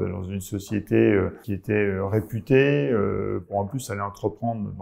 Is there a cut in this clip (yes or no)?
yes